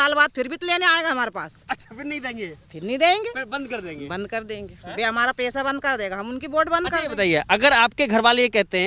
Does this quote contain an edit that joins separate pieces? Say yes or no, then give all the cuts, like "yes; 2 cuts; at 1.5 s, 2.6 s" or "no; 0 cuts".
no; 0 cuts